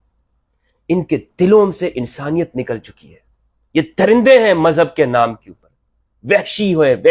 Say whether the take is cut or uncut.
uncut